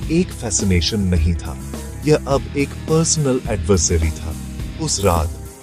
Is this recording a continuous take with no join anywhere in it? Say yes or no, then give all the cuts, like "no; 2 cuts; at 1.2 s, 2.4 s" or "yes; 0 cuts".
yes; 0 cuts